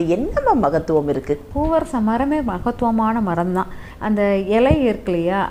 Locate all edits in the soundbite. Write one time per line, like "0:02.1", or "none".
0:01.5
0:03.9